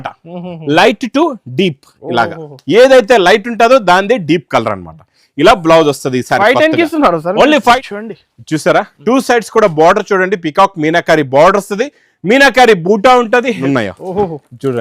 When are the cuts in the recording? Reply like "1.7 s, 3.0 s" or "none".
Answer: 7.8 s, 13.6 s

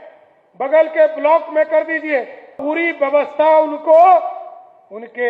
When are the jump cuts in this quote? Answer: 2.6 s

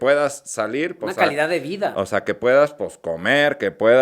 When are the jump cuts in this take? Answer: none

